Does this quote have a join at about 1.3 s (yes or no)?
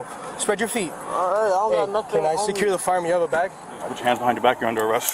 no